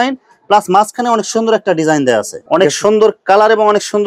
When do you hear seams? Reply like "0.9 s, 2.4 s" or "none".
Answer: 2.4 s

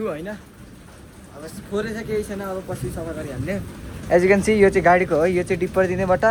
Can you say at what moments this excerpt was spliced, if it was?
none

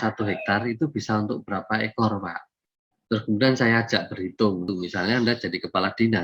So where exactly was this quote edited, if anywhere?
4.7 s

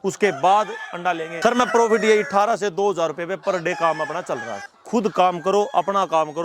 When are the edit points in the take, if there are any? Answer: 1.3 s, 4.6 s

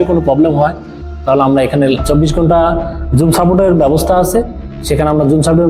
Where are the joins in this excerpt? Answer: 2.0 s

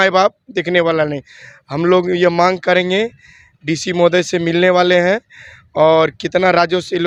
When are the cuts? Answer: none

